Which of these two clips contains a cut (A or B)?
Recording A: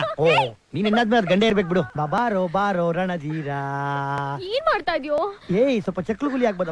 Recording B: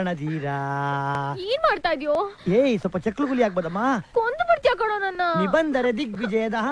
A